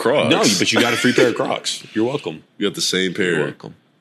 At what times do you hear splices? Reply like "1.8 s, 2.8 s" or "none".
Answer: 2.5 s